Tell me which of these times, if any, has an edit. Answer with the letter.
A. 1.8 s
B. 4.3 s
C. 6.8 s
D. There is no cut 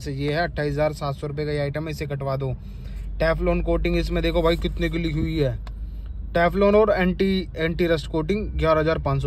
D